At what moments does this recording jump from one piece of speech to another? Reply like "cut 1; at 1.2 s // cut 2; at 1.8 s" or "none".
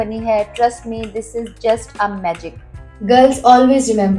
cut 1; at 2.9 s

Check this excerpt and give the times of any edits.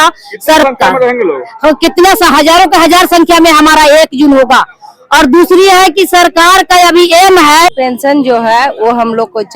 cut 1; at 7.8 s

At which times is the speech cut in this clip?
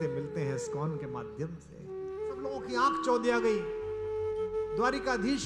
cut 1; at 2.6 s

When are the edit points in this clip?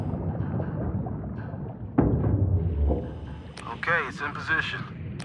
none

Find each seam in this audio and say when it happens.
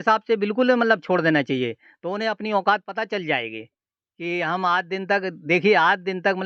none

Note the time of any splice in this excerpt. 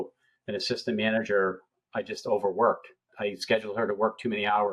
cut 1; at 3.1 s

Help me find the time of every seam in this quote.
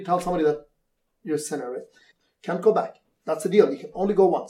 cut 1; at 2.1 s

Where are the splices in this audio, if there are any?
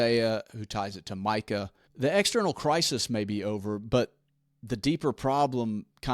cut 1; at 1.9 s

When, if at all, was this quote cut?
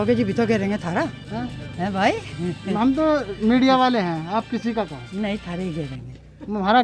none

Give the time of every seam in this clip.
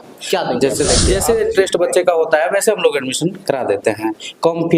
cut 1; at 1.0 s

